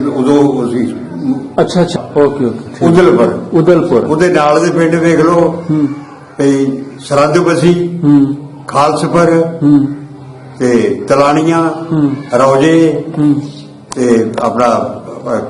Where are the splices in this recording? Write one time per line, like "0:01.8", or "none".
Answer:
0:01.9